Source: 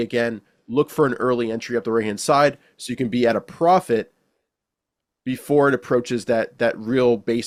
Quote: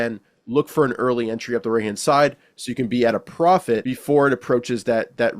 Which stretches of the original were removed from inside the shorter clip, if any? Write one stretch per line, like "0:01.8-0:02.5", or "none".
0:04.1-0:05.3